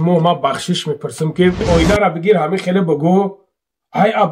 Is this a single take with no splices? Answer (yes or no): no